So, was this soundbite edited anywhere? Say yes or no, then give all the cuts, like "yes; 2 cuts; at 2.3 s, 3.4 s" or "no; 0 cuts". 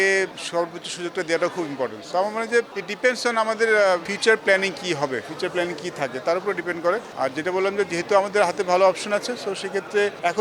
no; 0 cuts